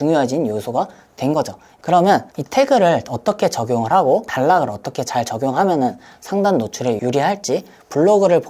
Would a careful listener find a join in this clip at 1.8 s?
yes; 3 cuts; at 1.8 s, 4.3 s, 7.0 s

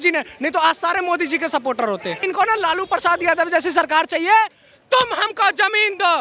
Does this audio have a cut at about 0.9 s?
no; 1 cut; at 2.2 s

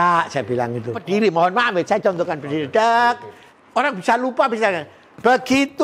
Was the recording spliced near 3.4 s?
no; 1 cut; at 1.0 s

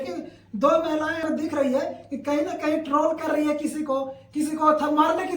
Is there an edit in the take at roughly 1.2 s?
yes; 1 cut; at 1.2 s

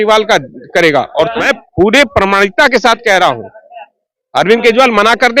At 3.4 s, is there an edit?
no; 1 cut; at 1.4 s

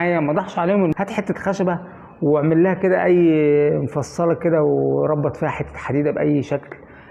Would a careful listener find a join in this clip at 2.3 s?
no; 1 cut; at 0.9 s

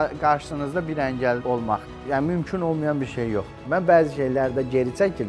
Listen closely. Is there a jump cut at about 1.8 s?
yes; 2 cuts; at 1.8 s, 3.6 s

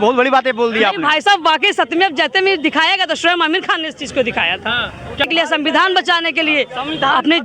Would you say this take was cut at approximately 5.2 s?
yes; 1 cut; at 5.2 s

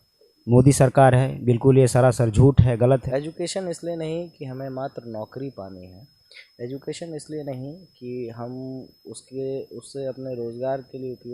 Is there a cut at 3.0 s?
yes; 1 cut; at 3.0 s

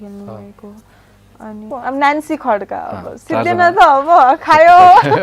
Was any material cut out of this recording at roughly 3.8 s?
no; 1 cut; at 1.7 s

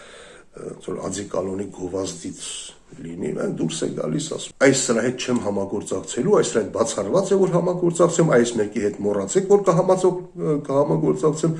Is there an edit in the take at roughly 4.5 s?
yes; 1 cut; at 4.5 s

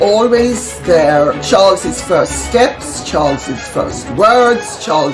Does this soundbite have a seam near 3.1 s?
no; 1 cut; at 1.4 s

